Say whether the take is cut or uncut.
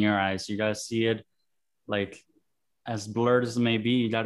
uncut